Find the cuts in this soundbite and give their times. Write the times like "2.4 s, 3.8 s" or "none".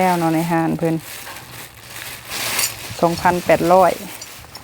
none